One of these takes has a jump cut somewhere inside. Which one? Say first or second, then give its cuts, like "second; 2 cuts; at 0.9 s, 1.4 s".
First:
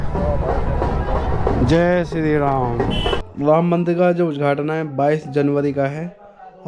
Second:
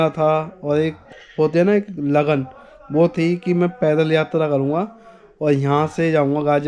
first; 1 cut; at 3.2 s